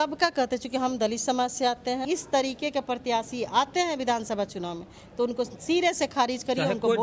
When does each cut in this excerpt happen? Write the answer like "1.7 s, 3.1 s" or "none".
2.0 s